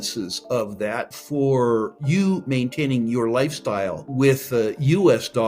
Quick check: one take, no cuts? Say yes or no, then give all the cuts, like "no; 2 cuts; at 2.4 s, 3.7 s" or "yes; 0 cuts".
no; 3 cuts; at 1.2 s, 2.0 s, 4.0 s